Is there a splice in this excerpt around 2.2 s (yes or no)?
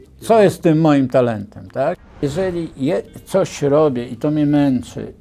yes